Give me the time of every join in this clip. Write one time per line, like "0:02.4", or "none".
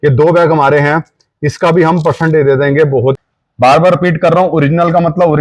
0:03.2